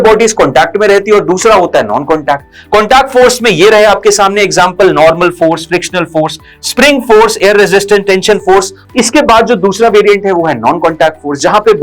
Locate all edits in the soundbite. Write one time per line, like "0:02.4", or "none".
0:08.8

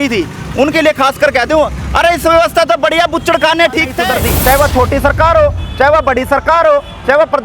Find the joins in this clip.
0:04.0

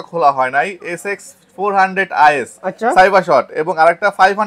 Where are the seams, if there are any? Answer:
none

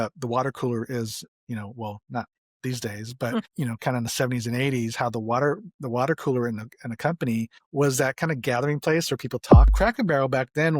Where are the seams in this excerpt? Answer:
0:09.7

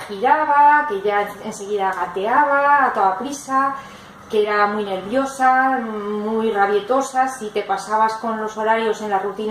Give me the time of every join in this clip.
0:07.6

